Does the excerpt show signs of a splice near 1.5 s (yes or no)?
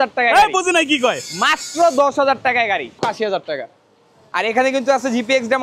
no